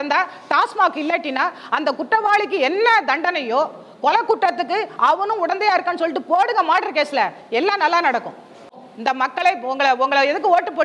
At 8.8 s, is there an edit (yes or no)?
yes